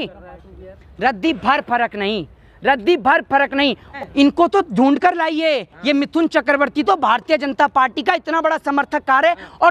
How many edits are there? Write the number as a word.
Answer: one